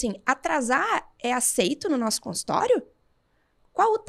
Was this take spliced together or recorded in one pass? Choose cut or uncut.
uncut